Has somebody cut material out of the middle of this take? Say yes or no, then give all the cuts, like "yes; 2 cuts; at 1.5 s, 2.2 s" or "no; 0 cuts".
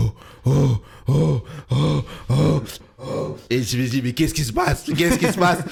no; 0 cuts